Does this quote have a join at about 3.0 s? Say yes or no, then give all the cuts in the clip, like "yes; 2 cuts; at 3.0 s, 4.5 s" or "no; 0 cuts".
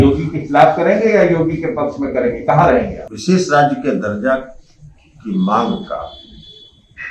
yes; 1 cut; at 3.0 s